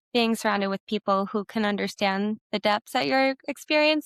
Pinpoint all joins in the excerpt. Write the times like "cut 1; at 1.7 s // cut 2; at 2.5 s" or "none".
none